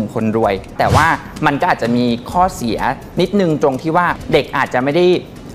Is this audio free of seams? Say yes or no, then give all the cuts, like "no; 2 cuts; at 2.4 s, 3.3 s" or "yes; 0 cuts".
no; 2 cuts; at 0.7 s, 4.1 s